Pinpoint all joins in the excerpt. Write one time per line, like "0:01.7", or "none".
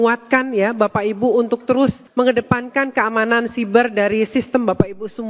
0:02.0